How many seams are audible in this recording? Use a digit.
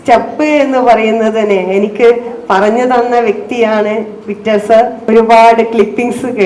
1